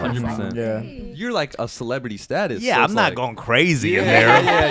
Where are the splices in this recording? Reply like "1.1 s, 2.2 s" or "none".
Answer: 1.0 s